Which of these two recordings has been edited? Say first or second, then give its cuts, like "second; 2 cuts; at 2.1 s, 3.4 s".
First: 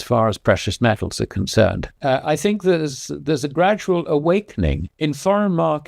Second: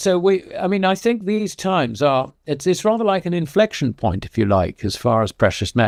first; 2 cuts; at 1.9 s, 4.8 s